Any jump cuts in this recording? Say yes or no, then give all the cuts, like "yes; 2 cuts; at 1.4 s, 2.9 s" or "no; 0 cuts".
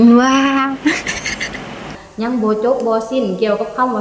yes; 1 cut; at 2.0 s